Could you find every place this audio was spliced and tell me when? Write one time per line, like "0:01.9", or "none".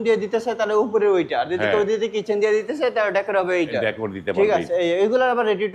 none